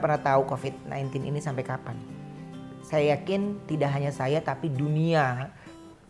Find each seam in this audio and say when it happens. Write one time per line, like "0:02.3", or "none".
none